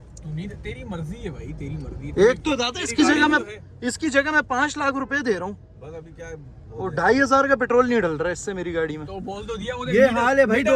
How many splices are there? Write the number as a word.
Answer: zero